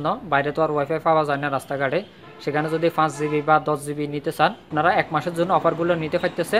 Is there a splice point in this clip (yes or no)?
yes